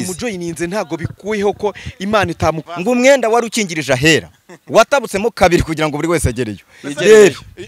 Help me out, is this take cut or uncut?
cut